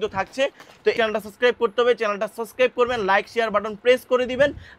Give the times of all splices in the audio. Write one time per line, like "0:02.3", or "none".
0:00.9

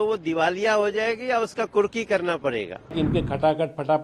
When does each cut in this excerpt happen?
0:02.9

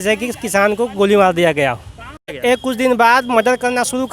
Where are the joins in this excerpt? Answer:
0:02.4

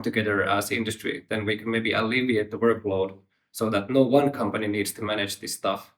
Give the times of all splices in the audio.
0:01.2

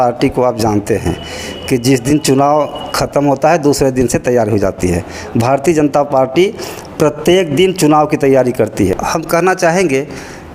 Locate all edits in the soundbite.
0:09.0

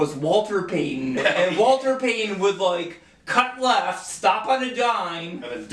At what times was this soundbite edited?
0:01.2

